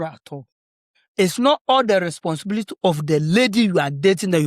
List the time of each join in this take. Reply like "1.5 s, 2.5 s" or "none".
none